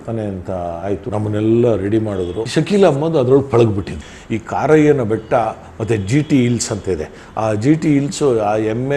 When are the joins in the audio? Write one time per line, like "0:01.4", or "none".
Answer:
0:02.4
0:03.9